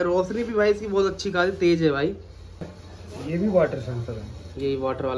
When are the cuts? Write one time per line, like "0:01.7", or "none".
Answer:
0:02.7